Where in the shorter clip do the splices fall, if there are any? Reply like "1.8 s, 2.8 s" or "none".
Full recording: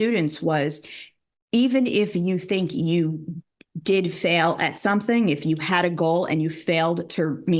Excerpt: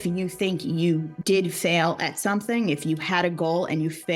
1.1 s